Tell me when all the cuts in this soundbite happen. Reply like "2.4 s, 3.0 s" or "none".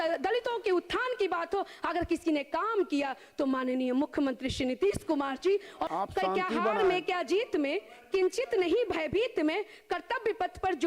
5.8 s